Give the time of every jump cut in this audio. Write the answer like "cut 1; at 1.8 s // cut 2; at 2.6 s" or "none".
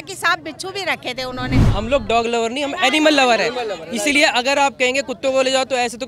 cut 1; at 1.6 s